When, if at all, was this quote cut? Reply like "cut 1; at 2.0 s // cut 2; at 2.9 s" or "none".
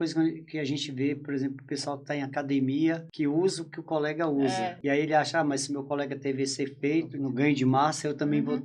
cut 1; at 3.1 s // cut 2; at 4.8 s // cut 3; at 7.1 s